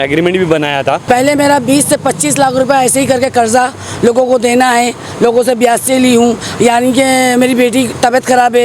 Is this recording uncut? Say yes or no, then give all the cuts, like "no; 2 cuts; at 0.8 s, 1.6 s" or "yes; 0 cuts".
no; 1 cut; at 1.0 s